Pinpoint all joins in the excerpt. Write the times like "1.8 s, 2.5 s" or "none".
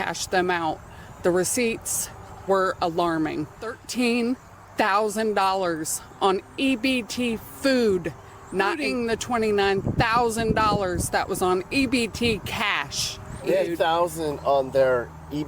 3.8 s, 8.8 s, 13.7 s